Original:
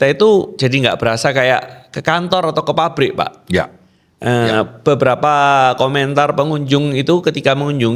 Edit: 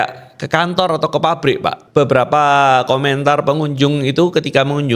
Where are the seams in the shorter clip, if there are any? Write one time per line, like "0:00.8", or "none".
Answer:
0:01.8